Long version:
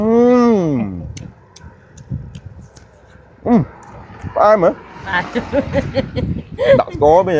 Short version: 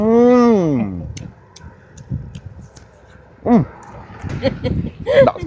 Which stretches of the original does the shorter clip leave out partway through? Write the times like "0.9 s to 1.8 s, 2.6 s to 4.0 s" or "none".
4.3 s to 5.8 s